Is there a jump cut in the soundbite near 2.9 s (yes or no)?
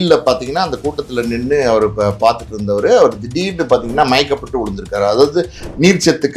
no